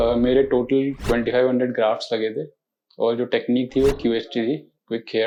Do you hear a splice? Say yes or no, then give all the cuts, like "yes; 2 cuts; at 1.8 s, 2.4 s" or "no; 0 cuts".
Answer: no; 0 cuts